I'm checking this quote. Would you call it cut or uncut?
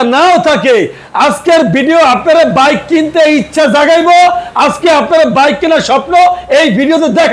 uncut